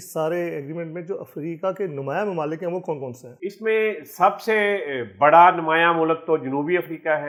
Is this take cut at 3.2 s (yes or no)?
no